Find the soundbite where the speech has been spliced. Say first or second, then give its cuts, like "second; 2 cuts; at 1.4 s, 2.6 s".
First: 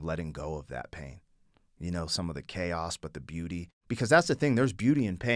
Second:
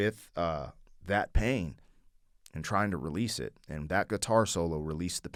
first; 1 cut; at 3.7 s